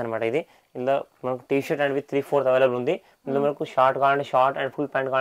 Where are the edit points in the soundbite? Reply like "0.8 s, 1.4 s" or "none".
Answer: none